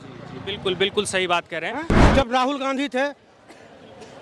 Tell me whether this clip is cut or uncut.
cut